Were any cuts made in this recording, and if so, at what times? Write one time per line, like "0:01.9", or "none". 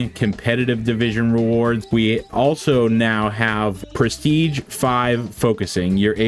0:01.8
0:03.9